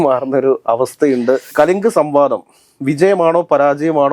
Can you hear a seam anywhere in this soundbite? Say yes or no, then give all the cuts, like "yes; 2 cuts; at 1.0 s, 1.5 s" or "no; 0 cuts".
yes; 1 cut; at 1.5 s